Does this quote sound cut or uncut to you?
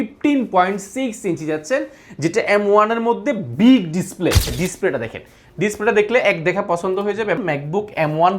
cut